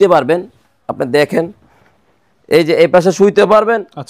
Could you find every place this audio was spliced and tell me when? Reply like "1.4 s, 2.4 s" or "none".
none